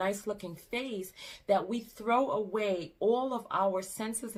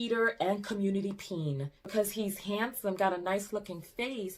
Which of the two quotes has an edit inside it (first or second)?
second